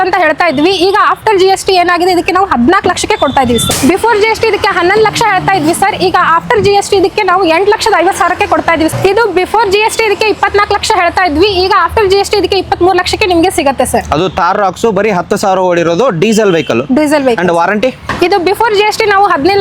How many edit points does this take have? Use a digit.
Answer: 3